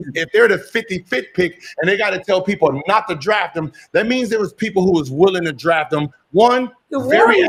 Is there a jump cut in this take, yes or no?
no